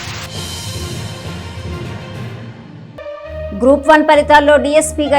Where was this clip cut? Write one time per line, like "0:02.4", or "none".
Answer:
0:03.4